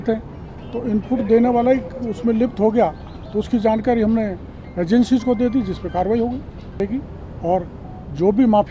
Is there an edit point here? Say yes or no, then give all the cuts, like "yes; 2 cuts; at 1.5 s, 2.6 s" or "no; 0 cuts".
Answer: yes; 1 cut; at 6.8 s